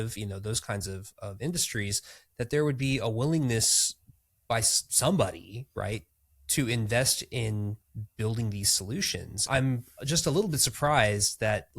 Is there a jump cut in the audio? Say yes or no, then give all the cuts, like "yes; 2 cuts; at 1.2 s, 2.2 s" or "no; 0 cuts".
yes; 1 cut; at 9.5 s